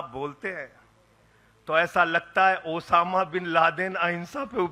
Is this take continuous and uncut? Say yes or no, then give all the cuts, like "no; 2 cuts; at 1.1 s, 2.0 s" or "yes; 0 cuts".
yes; 0 cuts